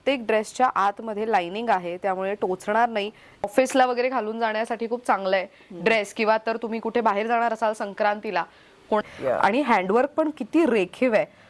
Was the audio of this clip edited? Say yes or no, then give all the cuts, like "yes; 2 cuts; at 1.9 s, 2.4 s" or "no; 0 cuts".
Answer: yes; 2 cuts; at 3.5 s, 9.0 s